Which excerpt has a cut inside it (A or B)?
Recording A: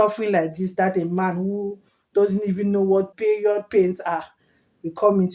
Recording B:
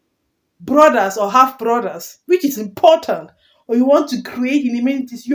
A